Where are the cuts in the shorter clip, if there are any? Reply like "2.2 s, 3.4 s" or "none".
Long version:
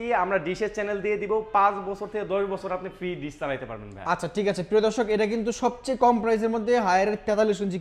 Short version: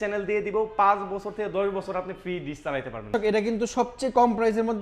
3.1 s